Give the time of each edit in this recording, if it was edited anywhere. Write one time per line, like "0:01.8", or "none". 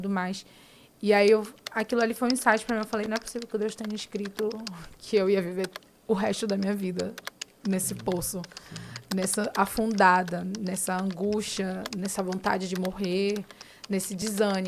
none